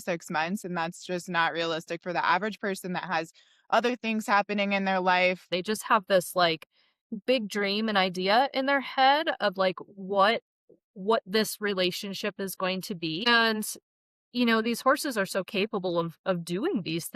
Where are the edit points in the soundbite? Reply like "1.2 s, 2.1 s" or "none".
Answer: 5.5 s, 13.3 s